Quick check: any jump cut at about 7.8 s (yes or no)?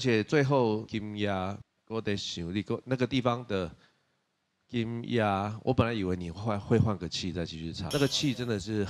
yes